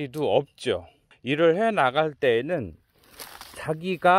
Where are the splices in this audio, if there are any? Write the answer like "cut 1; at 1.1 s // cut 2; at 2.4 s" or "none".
cut 1; at 1.1 s